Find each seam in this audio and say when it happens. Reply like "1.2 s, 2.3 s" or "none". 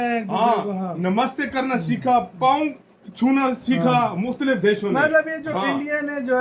none